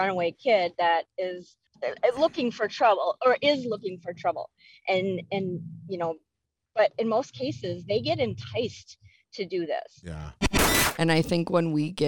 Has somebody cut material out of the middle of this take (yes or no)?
yes